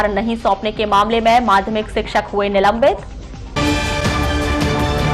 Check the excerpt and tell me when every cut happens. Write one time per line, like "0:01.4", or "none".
none